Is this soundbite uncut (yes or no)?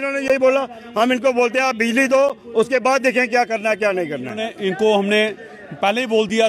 no